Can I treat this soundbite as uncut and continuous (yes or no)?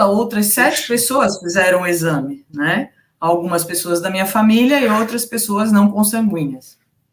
yes